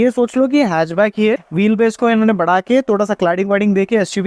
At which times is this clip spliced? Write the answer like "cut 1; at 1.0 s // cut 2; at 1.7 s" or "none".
cut 1; at 1.4 s